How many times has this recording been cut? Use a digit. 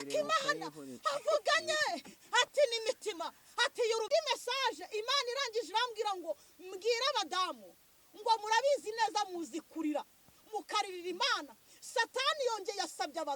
1